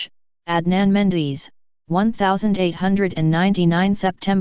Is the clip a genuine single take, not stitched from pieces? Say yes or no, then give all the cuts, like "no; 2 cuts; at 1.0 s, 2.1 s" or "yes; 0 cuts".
yes; 0 cuts